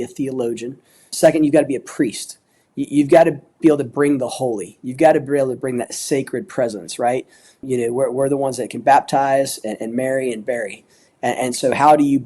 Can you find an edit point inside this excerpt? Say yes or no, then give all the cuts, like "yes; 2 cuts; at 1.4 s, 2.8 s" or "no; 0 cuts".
yes; 2 cuts; at 1.1 s, 7.6 s